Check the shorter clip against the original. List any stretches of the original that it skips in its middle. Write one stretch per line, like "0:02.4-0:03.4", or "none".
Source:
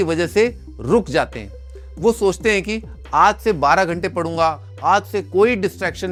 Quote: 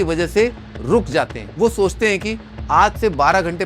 0:01.4-0:01.8